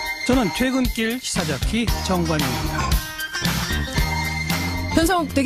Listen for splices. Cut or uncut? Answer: uncut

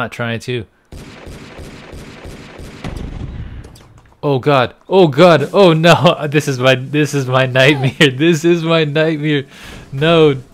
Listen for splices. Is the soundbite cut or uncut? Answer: uncut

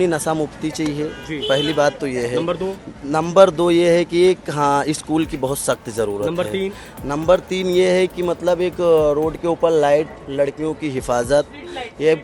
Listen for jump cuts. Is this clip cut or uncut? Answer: uncut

